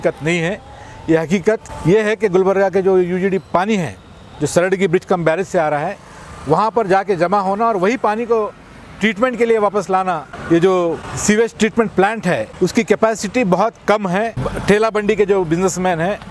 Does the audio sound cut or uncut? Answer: cut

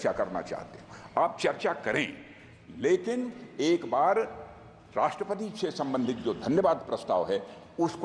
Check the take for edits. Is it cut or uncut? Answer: uncut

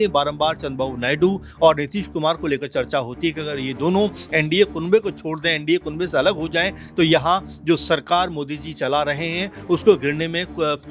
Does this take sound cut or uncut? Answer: uncut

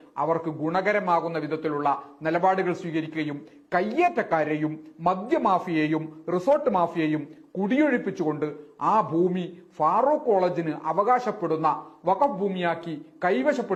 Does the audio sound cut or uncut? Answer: uncut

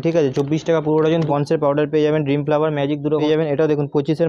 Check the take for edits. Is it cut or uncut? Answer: cut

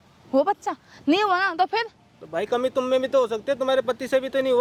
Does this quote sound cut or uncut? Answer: uncut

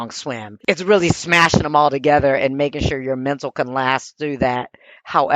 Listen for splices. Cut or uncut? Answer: uncut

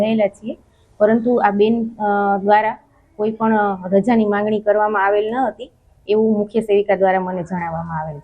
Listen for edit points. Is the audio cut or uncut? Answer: cut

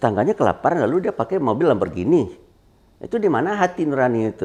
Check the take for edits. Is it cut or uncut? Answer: uncut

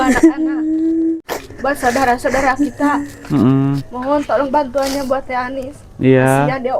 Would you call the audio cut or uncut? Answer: cut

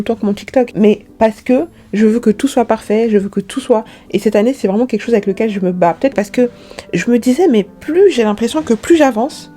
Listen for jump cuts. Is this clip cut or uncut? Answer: cut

